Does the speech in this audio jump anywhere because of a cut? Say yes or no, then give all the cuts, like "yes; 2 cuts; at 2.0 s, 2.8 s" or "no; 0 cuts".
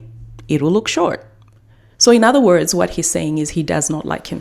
no; 0 cuts